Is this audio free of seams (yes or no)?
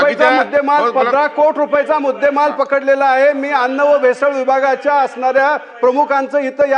yes